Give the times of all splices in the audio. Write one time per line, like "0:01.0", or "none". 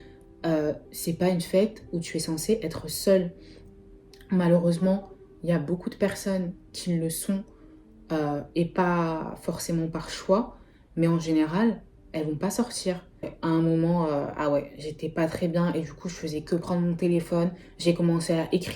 0:13.3